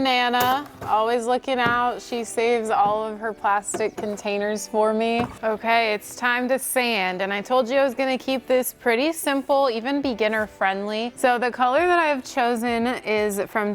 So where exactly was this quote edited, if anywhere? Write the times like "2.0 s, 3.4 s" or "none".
5.3 s, 11.1 s